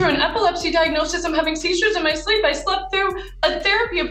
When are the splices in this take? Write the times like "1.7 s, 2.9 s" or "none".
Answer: none